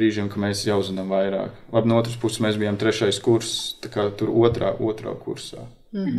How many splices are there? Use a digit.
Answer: 0